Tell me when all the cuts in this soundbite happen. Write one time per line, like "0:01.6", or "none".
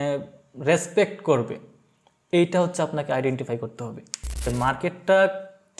0:04.5